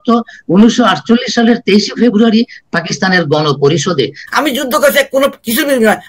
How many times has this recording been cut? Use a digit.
1